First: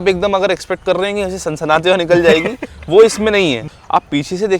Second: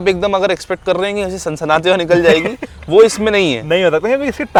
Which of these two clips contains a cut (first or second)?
first